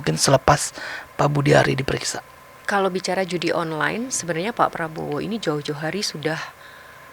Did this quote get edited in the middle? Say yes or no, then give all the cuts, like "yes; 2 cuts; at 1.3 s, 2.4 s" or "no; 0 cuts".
no; 0 cuts